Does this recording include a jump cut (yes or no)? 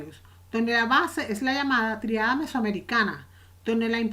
no